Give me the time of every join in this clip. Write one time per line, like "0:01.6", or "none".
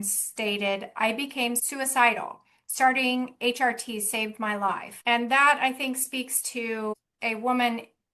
0:01.6
0:04.9
0:07.1